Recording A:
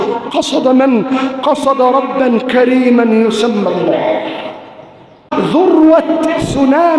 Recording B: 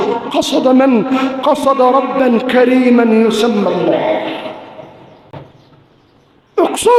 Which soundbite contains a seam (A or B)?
A